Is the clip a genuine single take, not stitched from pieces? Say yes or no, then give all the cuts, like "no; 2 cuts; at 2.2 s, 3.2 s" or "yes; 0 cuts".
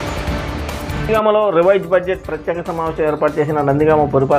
no; 1 cut; at 0.9 s